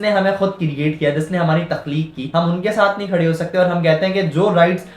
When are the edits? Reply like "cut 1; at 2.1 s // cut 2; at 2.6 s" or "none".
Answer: cut 1; at 2.2 s